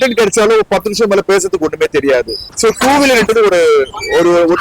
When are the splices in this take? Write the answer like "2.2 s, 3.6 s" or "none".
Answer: 2.4 s